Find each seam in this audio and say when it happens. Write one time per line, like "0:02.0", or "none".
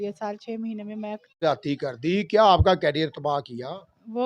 0:01.4